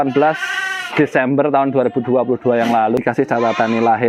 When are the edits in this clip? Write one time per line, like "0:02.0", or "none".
0:02.9